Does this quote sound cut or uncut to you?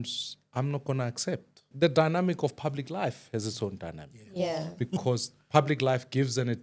cut